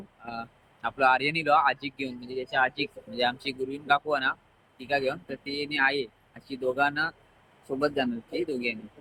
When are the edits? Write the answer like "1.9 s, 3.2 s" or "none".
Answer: none